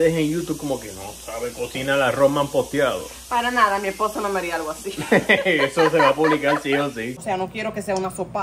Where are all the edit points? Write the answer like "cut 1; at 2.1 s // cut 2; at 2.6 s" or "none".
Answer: cut 1; at 7.2 s